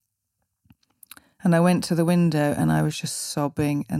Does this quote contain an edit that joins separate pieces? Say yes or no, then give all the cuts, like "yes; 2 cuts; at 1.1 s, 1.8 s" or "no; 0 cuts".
no; 0 cuts